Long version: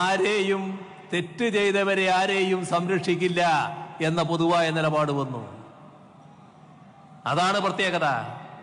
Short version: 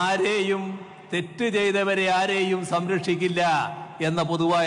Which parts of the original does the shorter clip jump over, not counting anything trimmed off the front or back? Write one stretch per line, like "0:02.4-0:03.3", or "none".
none